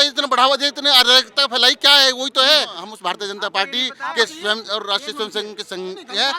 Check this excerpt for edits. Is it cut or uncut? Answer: cut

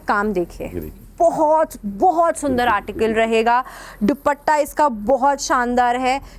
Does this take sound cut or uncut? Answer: uncut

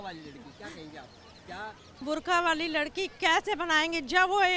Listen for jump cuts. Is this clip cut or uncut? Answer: cut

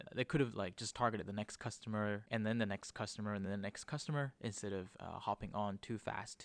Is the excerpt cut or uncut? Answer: uncut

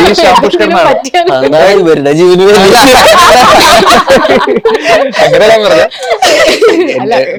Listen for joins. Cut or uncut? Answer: uncut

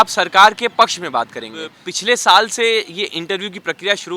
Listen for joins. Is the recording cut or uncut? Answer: cut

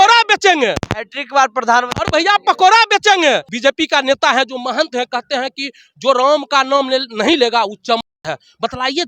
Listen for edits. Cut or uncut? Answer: cut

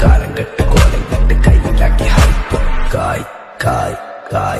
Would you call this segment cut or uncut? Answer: cut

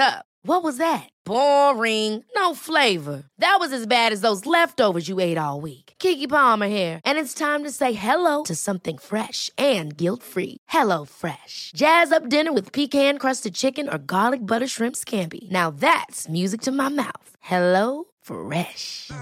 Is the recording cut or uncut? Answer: uncut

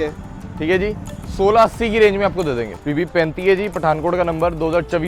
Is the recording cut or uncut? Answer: cut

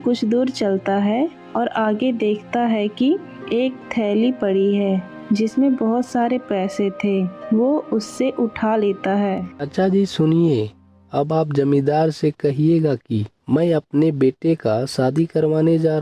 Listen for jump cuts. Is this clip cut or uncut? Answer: cut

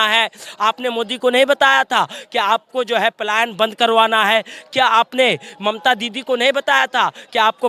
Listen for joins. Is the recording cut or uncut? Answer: uncut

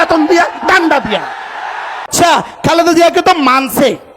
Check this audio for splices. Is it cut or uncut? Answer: cut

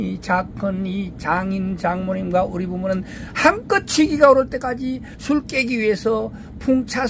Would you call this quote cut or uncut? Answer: cut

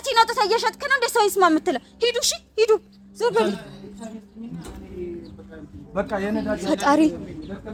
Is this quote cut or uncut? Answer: uncut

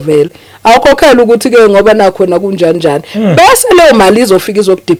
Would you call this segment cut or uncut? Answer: uncut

